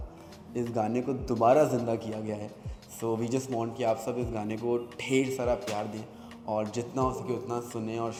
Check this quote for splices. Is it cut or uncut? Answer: uncut